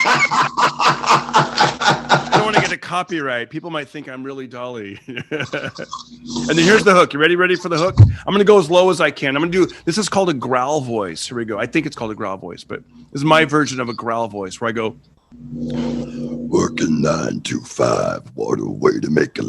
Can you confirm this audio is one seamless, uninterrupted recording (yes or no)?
yes